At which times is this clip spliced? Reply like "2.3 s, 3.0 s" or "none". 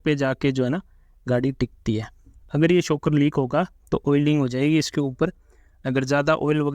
2.4 s